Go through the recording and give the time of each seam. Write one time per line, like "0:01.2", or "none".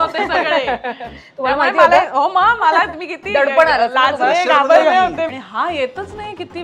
0:05.3